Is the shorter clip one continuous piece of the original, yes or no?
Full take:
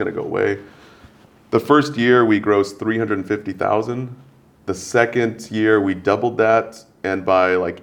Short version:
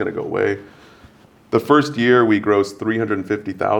yes